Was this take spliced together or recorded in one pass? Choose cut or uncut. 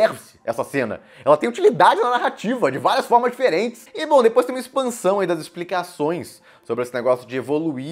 uncut